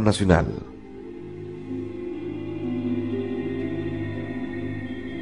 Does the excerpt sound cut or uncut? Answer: uncut